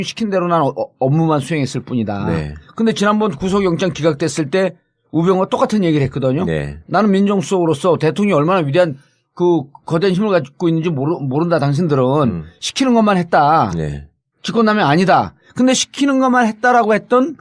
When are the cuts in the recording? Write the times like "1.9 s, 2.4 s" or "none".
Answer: 15.4 s